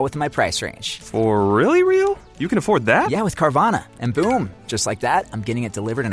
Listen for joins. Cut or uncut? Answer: uncut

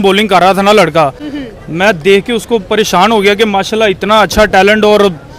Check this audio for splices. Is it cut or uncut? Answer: uncut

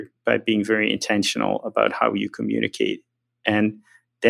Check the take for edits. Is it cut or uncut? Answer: uncut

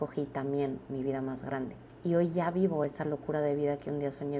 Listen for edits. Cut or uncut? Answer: cut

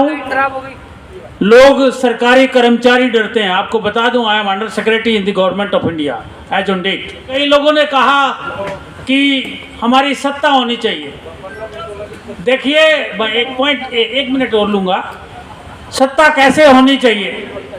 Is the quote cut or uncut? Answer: cut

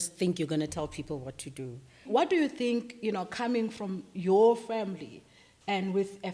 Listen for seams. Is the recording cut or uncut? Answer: cut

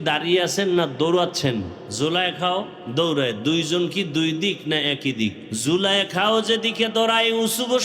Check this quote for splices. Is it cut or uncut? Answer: cut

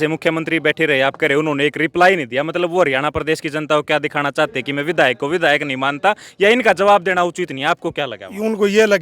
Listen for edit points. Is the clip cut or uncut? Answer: uncut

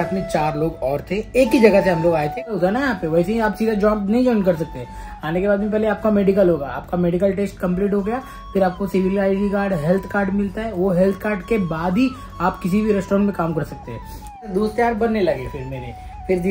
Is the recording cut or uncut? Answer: cut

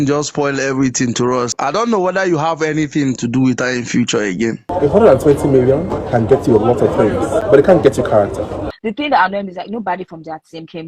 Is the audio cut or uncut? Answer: cut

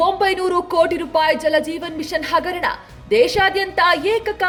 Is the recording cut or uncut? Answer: uncut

